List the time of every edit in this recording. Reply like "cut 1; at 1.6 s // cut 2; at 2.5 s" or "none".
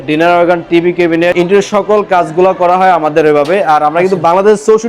cut 1; at 1.3 s